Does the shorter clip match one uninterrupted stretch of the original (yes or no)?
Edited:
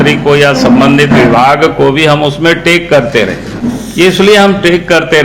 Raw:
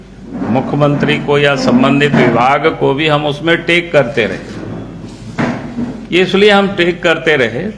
no